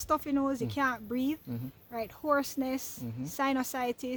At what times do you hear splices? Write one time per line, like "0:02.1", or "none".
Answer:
none